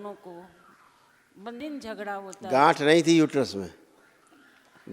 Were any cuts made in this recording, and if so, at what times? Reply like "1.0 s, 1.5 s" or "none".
1.6 s